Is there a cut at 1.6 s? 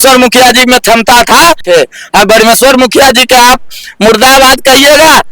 yes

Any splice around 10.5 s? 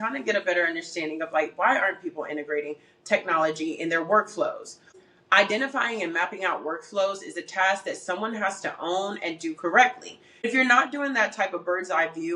yes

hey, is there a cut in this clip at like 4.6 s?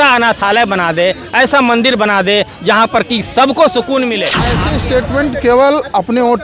yes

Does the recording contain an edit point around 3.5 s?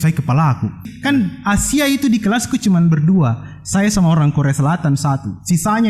no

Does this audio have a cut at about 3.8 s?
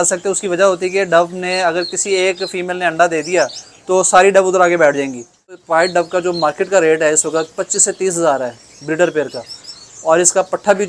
no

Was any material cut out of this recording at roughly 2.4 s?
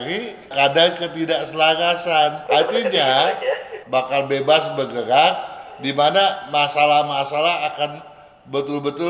yes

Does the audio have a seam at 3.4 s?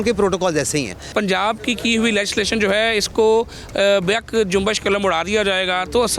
no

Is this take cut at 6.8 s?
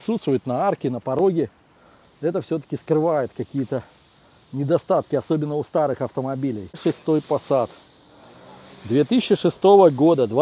yes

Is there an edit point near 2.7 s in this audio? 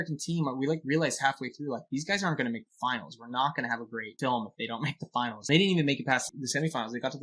no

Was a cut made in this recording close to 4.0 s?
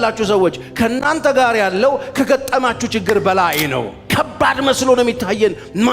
yes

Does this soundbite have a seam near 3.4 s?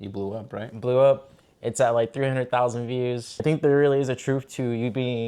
yes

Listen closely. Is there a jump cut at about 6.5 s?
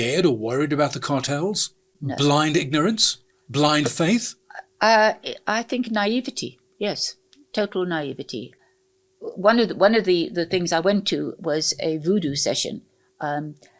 no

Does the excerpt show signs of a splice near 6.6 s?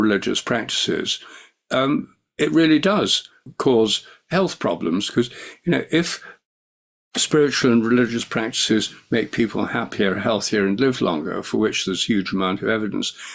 no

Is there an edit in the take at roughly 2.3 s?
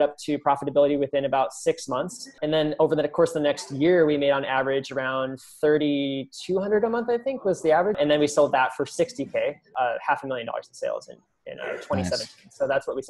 yes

